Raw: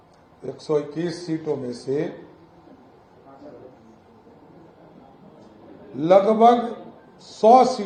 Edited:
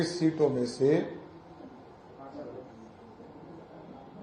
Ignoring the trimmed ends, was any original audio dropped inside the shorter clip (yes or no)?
no